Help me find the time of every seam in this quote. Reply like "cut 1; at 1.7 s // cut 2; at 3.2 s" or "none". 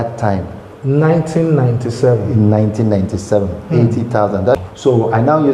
cut 1; at 4.6 s

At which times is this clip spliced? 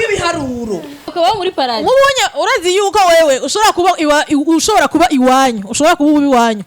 cut 1; at 1.1 s

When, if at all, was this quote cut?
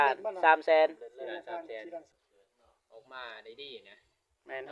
cut 1; at 2.1 s

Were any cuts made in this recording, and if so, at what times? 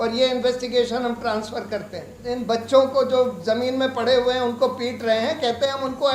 cut 1; at 2.2 s

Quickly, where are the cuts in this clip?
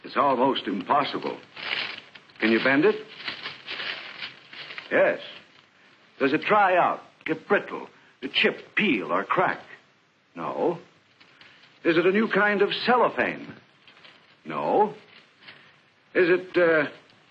cut 1; at 4.3 s

